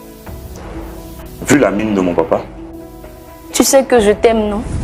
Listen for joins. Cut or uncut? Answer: cut